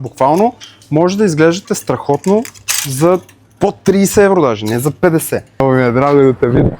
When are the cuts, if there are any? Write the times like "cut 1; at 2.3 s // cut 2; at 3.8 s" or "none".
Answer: cut 1; at 5.6 s